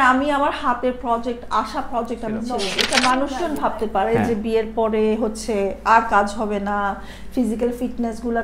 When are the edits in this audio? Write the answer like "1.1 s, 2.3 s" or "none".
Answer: 2.8 s